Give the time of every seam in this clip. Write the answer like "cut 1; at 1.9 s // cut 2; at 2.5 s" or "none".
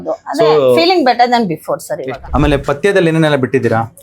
cut 1; at 1.9 s